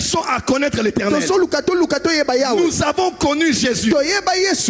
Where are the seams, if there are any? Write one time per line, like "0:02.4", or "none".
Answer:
none